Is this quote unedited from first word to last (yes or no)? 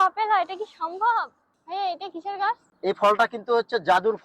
no